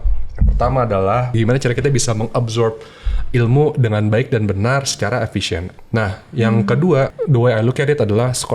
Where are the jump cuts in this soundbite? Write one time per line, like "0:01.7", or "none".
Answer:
0:01.3
0:05.7
0:07.1